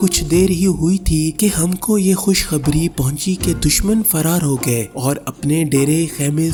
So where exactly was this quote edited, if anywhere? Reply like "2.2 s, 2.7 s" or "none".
none